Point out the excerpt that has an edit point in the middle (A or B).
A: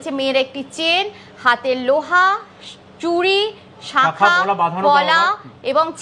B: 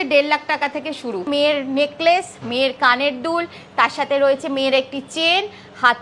B